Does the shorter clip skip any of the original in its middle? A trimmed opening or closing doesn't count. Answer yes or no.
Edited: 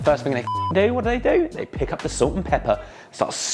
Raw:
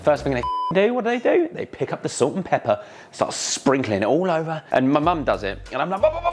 no